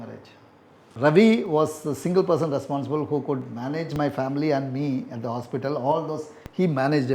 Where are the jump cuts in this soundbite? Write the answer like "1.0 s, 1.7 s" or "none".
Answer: 0.9 s